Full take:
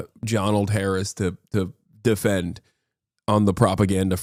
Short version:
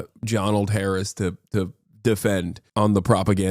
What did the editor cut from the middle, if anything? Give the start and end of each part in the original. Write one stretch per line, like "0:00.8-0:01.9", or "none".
0:02.6-0:03.1